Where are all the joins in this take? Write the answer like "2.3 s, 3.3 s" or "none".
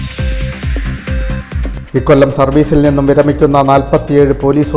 1.8 s

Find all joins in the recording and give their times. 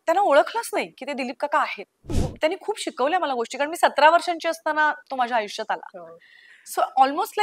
2.2 s

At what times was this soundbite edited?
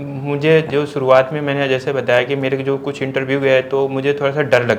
none

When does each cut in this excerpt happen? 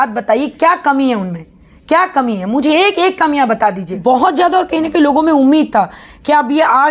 3.9 s

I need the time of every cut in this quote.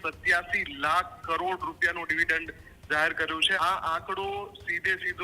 3.6 s

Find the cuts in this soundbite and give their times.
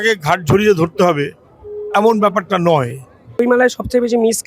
3.4 s

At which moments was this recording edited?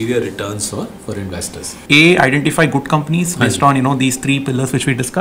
1.8 s

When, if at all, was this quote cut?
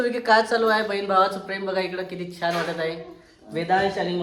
none

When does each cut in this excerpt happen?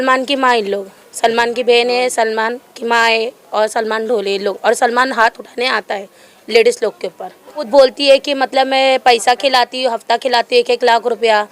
7.6 s

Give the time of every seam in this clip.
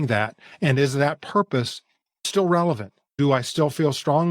2.2 s, 3.2 s

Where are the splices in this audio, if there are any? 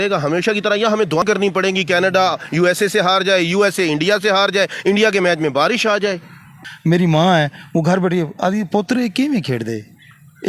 1.2 s, 6.5 s

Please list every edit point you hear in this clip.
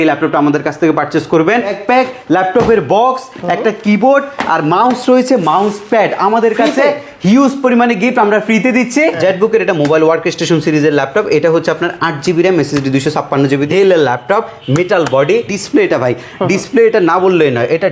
1.7 s, 9.2 s, 13.6 s, 15.5 s

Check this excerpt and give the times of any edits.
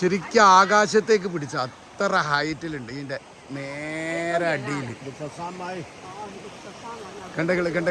none

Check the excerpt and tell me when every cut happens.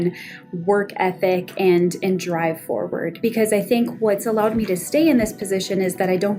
3.2 s

